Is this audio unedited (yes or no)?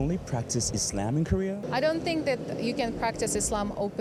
yes